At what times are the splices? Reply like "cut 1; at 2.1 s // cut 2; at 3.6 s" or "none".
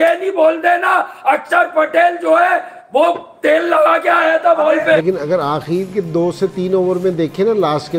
cut 1; at 5.0 s